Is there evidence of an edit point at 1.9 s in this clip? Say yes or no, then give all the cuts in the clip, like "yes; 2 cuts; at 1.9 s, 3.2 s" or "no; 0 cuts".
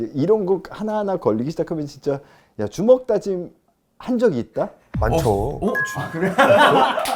no; 0 cuts